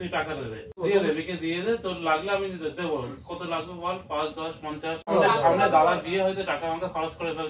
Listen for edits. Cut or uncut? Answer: cut